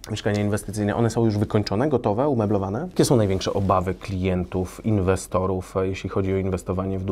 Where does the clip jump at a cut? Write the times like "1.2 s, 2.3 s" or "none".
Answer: 2.8 s